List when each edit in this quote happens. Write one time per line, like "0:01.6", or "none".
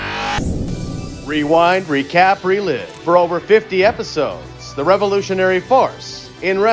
none